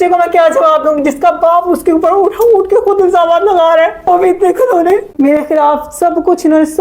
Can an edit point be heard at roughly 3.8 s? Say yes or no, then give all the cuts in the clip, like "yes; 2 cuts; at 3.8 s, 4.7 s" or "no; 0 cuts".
no; 1 cut; at 5.2 s